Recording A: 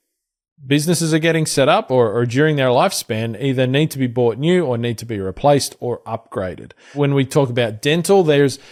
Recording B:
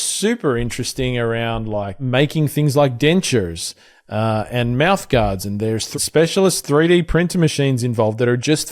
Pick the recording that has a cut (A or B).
B